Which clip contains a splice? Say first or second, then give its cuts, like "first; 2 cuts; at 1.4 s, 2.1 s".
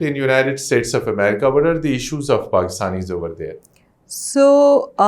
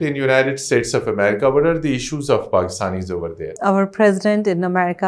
second; 1 cut; at 3.6 s